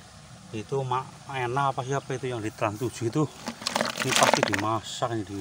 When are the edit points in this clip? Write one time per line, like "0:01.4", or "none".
none